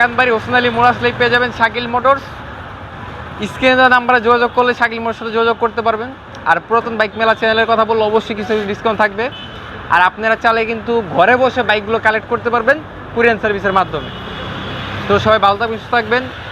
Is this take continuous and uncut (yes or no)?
yes